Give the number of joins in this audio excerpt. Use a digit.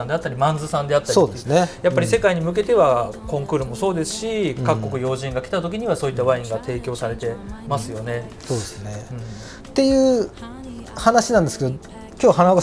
0